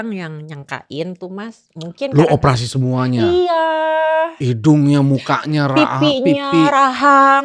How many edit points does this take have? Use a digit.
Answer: 0